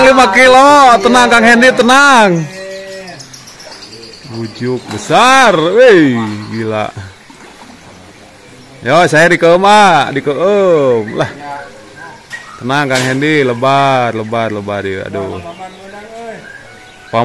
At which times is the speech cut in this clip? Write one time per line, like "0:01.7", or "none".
none

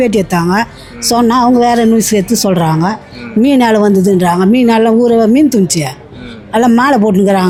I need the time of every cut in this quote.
none

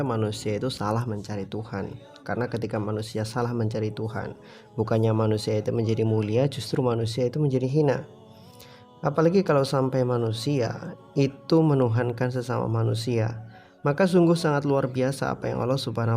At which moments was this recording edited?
0:08.3

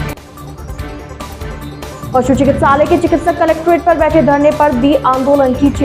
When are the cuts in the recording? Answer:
0:01.4

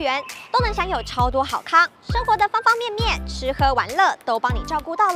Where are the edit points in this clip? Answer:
none

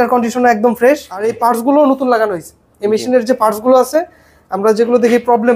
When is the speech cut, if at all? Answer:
0:01.3

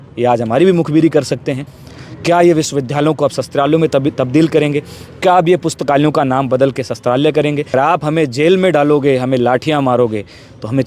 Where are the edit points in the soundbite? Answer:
0:01.7
0:07.7

